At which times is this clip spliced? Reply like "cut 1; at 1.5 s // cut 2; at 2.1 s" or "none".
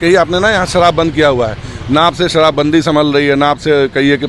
none